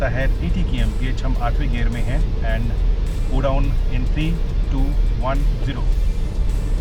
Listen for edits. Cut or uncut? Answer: uncut